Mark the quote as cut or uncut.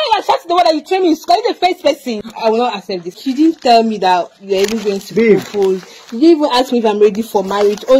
cut